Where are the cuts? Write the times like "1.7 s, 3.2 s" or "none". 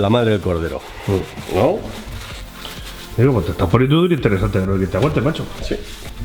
none